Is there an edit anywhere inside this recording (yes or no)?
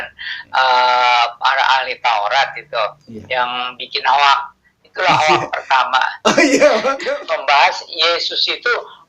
yes